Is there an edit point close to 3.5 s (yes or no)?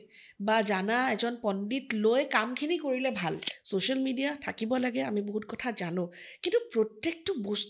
yes